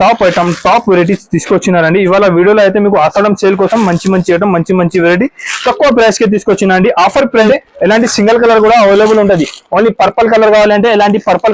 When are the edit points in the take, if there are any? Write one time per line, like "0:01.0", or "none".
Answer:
0:07.5